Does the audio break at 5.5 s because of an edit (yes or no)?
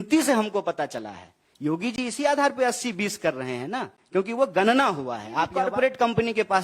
yes